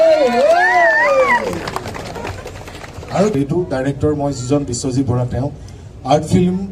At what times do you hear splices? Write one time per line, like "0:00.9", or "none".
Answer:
0:03.3